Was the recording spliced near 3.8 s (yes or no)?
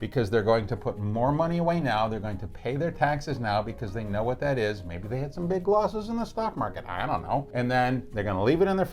no